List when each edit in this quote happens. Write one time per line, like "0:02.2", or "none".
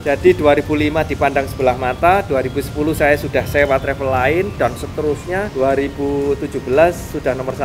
none